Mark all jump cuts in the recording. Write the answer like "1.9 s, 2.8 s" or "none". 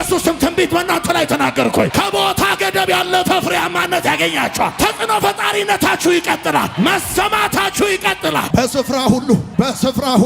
none

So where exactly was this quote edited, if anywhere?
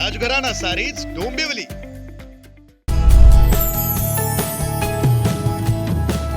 2.8 s

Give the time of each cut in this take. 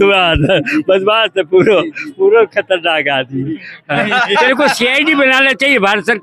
none

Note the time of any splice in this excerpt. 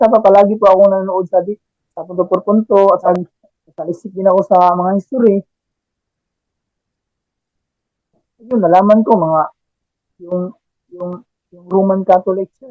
3.1 s

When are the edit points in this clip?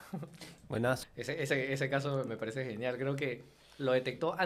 1.0 s

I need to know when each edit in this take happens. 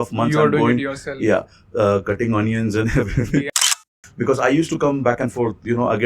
3.5 s

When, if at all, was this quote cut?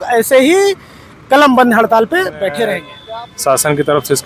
2.9 s

